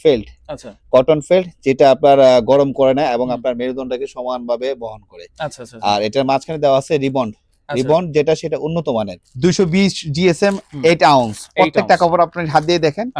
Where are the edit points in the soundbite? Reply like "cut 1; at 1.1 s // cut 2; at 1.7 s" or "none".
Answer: cut 1; at 9.2 s

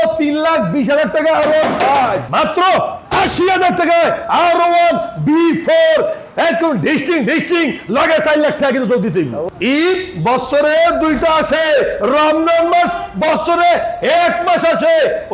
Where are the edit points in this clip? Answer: cut 1; at 2.2 s // cut 2; at 9.5 s

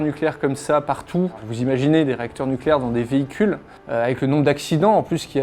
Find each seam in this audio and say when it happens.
none

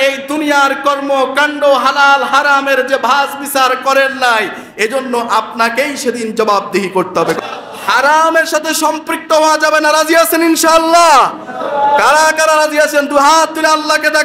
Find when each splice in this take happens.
cut 1; at 7.4 s

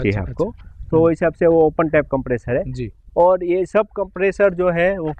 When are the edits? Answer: none

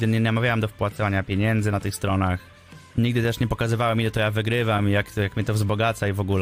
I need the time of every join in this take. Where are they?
none

